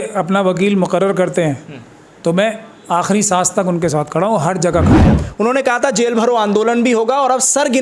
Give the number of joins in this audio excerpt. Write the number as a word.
one